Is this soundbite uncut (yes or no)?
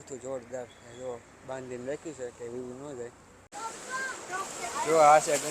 no